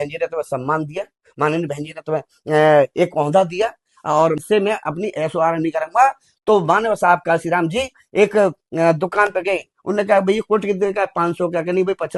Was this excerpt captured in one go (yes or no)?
no